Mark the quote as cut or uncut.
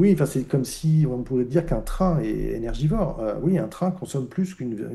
uncut